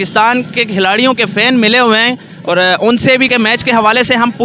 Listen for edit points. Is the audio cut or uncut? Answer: cut